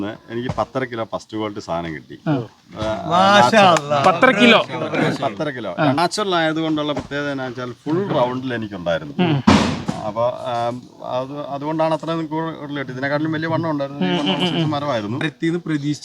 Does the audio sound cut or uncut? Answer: cut